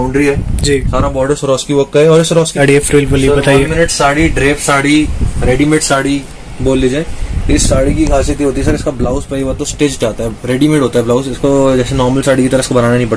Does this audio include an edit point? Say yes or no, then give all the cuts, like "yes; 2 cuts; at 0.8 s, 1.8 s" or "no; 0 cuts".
yes; 1 cut; at 2.5 s